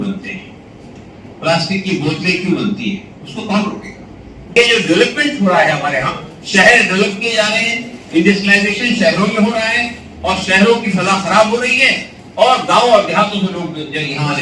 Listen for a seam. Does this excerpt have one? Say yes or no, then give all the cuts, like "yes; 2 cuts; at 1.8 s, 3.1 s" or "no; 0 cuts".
yes; 1 cut; at 4.5 s